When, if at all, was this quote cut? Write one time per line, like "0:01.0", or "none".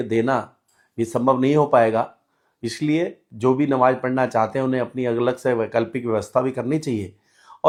none